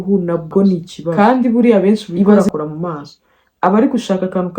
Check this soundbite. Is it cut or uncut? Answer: cut